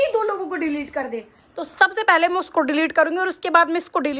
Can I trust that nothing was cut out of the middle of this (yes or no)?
yes